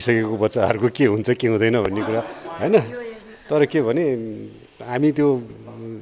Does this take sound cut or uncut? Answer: uncut